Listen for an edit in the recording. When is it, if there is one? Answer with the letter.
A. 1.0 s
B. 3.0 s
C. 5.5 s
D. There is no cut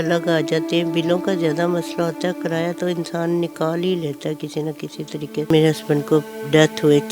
C